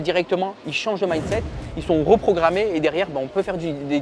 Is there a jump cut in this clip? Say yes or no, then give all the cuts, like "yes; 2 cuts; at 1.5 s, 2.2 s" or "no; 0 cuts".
no; 0 cuts